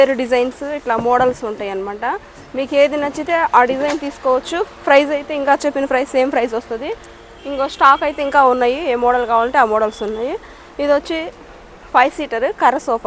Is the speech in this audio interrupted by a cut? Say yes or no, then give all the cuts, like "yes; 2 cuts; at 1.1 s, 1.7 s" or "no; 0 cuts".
no; 0 cuts